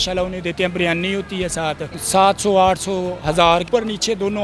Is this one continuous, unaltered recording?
no; 2 cuts; at 1.9 s, 3.7 s

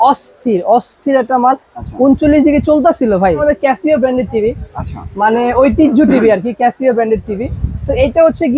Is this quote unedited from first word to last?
no; 1 cut; at 3.4 s

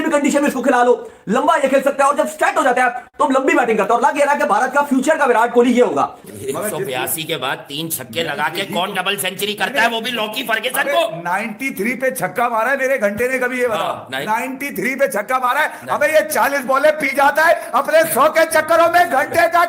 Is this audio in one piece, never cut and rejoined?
no; 1 cut; at 6.2 s

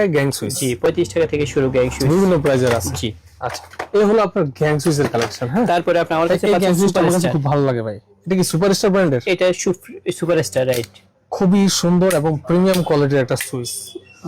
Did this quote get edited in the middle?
no; 0 cuts

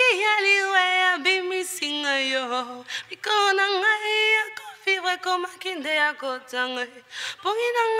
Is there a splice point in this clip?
no; 0 cuts

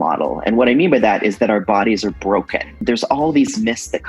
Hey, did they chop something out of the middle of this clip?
yes; 1 cut; at 2.8 s

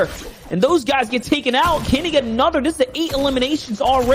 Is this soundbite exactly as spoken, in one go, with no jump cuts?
yes; 0 cuts

